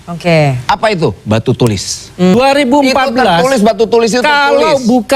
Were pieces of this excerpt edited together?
yes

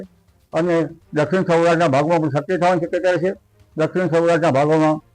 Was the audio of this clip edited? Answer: no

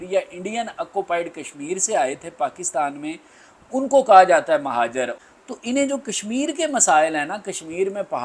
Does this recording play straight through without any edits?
no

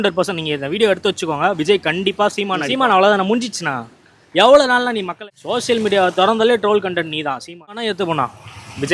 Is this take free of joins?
no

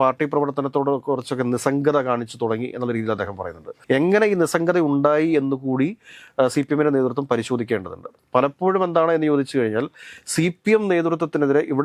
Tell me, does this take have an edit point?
no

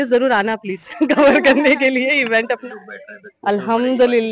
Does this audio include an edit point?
yes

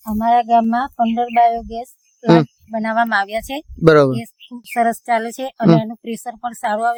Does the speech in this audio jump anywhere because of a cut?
no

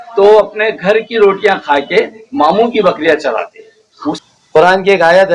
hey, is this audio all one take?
no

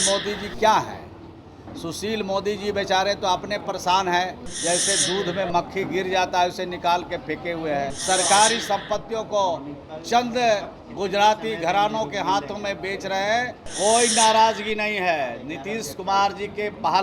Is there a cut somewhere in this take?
yes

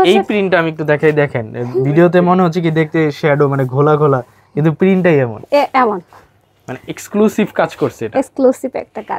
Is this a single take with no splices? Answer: yes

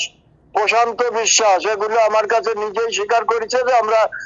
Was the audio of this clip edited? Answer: no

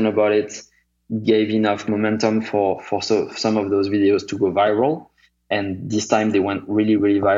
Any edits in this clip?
yes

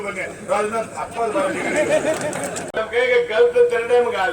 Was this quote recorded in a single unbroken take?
no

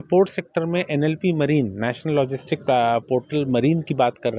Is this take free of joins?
yes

